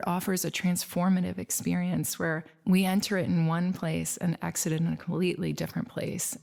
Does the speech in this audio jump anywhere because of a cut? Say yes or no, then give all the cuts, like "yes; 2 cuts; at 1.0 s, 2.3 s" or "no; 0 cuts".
no; 0 cuts